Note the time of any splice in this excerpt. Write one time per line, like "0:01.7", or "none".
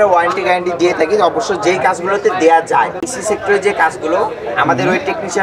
0:03.0